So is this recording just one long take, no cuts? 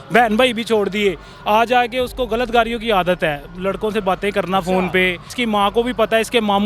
no; 1 cut; at 5.3 s

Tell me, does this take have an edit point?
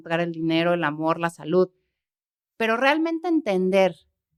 no; 0 cuts

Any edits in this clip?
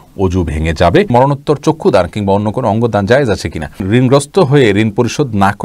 yes; 2 cuts; at 1.1 s, 3.8 s

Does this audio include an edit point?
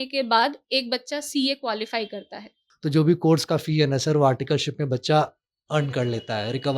yes; 1 cut; at 2.6 s

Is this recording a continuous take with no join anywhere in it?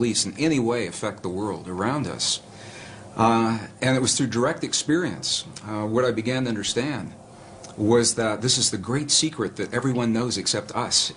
yes; 0 cuts

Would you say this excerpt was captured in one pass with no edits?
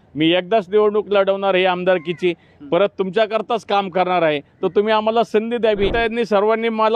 no; 1 cut; at 5.9 s

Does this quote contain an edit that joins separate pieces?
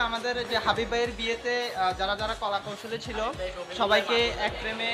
no; 0 cuts

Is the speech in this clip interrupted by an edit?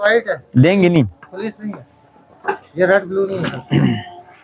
no; 0 cuts

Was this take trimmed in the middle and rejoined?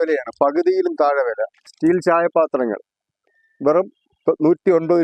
yes; 1 cut; at 1.6 s

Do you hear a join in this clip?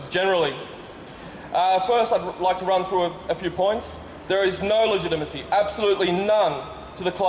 yes; 1 cut; at 2.3 s

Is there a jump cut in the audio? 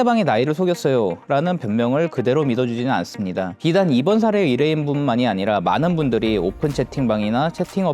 yes; 1 cut; at 3.5 s

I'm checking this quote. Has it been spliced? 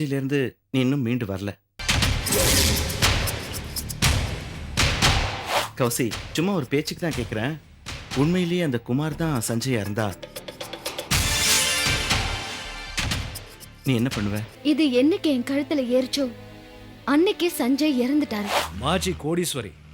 yes; 3 cuts; at 5.6 s, 14.5 s, 18.6 s

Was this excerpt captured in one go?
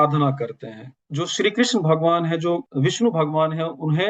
no; 2 cuts; at 1.0 s, 2.7 s

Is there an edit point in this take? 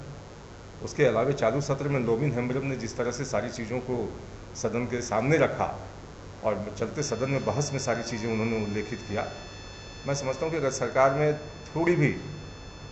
no; 0 cuts

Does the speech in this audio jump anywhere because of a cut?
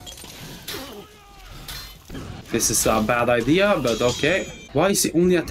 yes; 2 cuts; at 2.4 s, 4.6 s

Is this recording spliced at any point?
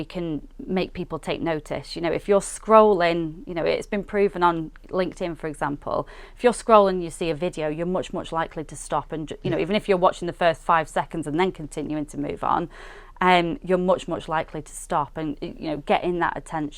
no; 0 cuts

